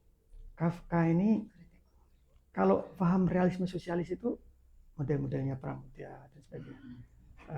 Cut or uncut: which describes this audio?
uncut